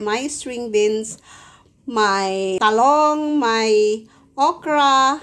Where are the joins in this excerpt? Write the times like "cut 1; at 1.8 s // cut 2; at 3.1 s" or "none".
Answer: cut 1; at 2.6 s